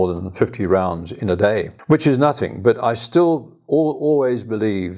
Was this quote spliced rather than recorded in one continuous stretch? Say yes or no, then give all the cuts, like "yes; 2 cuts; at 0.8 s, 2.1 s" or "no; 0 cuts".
yes; 1 cut; at 1.7 s